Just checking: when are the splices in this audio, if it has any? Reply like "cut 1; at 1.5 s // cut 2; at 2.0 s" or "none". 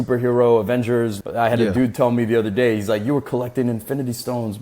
cut 1; at 1.2 s